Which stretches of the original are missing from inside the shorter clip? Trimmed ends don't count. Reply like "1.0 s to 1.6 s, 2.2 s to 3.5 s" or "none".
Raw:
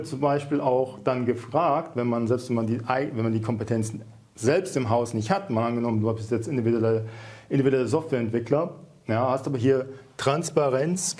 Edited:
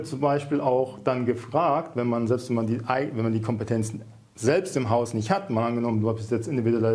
none